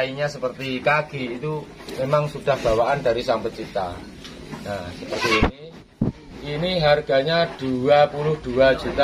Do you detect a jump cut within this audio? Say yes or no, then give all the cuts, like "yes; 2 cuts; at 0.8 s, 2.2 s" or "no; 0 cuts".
no; 0 cuts